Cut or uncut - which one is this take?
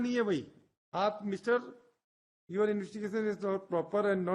uncut